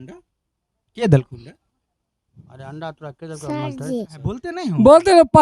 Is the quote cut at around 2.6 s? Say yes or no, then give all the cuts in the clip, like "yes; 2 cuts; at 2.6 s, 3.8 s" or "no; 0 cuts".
no; 1 cut; at 4.5 s